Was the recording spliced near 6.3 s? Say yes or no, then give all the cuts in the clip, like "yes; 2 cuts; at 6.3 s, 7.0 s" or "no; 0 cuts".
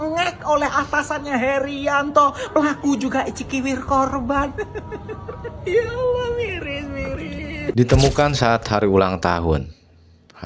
no; 1 cut; at 7.7 s